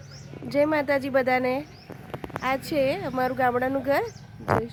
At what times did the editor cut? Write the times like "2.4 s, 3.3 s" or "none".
none